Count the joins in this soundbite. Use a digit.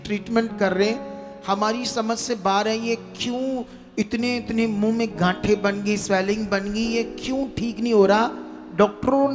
0